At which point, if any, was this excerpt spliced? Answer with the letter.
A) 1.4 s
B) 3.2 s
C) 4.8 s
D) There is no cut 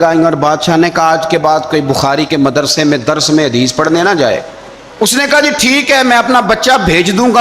C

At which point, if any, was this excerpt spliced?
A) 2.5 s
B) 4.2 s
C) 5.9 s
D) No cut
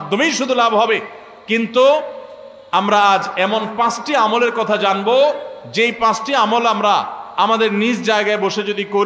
D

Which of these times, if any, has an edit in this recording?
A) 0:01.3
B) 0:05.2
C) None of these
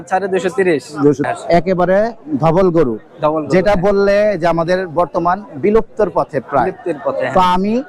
A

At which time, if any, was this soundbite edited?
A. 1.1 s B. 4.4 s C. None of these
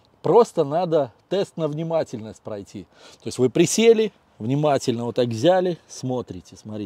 C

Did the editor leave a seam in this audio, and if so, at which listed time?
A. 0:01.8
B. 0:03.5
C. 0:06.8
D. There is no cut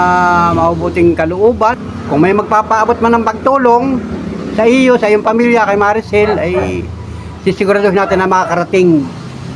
A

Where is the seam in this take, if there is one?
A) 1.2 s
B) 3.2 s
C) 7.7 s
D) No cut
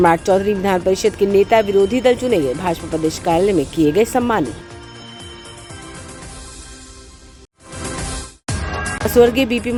D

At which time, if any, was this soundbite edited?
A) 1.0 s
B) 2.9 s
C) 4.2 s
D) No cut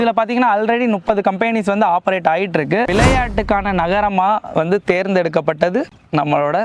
B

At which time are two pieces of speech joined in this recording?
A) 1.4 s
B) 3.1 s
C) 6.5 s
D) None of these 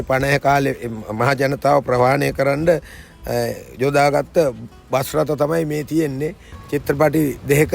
C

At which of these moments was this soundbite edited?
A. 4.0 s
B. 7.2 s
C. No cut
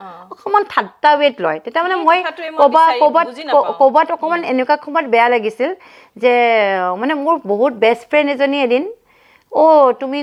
C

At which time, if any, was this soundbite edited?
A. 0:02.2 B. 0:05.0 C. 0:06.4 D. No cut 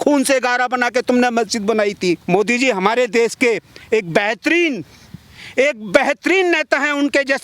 A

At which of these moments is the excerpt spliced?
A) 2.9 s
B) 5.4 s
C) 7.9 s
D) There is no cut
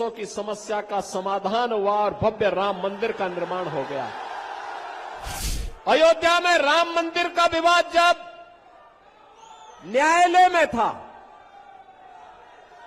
B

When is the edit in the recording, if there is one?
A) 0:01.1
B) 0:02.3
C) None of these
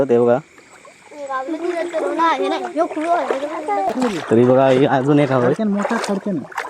C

